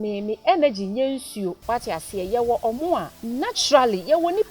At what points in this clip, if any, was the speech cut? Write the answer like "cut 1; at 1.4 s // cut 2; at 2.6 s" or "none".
cut 1; at 1.6 s // cut 2; at 3.2 s